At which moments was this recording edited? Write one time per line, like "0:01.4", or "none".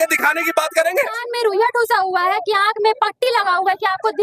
0:01.2